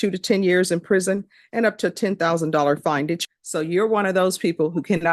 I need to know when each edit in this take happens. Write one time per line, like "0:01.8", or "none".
0:03.2